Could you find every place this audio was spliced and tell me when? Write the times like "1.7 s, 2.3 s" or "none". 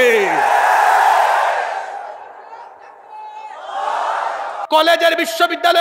4.5 s

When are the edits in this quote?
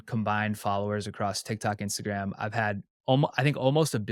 none

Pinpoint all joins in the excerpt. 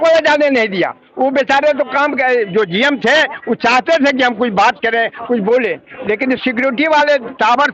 none

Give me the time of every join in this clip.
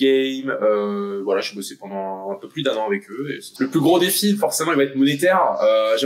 3.4 s

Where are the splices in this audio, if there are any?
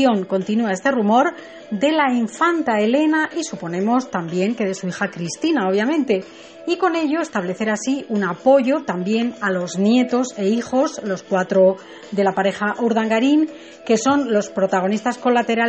1.0 s

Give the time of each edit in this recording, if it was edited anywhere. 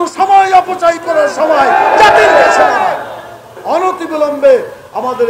3.6 s

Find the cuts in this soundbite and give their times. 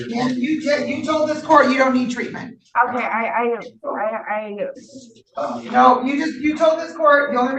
none

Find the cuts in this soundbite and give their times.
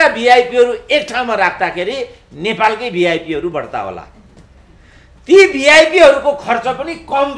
none

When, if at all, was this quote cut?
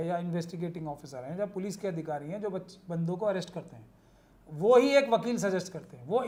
none

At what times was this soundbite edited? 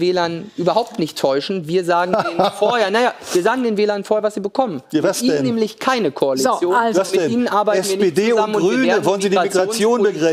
none

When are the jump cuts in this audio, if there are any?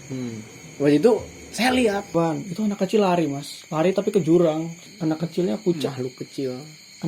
2.1 s, 4.8 s

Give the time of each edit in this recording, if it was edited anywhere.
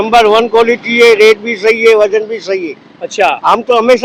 none

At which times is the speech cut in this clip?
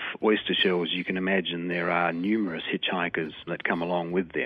3.5 s

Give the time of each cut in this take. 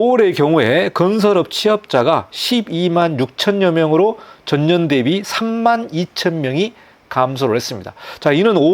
none

